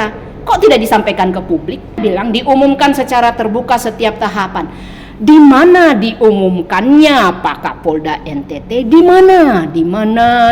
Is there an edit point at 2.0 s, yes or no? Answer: yes